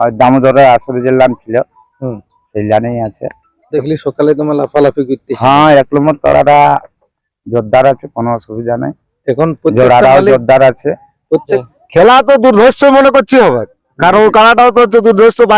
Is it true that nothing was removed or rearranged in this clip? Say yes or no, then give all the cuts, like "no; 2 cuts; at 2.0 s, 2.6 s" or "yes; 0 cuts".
no; 2 cuts; at 3.7 s, 11.6 s